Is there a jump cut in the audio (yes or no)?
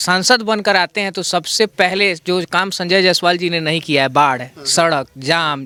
no